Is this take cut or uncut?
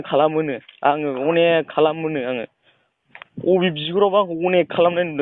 uncut